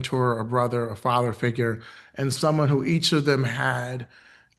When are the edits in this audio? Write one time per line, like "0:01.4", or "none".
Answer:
none